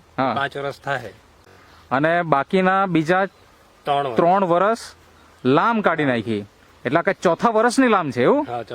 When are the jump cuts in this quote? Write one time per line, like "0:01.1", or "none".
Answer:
0:01.3